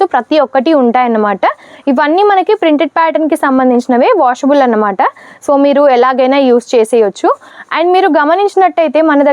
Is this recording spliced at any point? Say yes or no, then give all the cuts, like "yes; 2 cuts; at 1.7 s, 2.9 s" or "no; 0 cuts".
no; 0 cuts